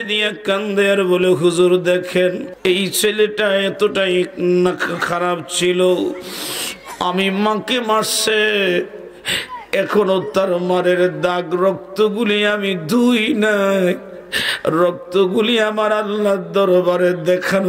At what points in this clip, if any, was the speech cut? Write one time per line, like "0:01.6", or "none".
0:02.5

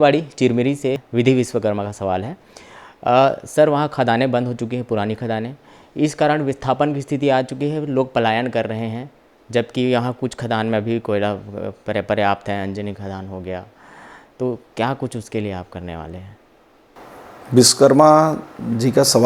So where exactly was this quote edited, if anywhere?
0:01.0

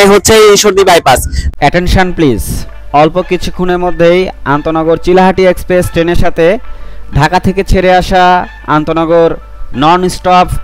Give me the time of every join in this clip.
0:01.4

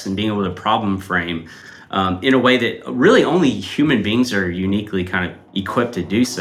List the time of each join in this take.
0:05.4

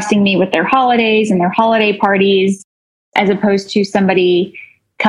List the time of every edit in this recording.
0:03.0

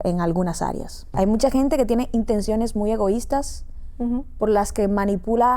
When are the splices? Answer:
0:01.1

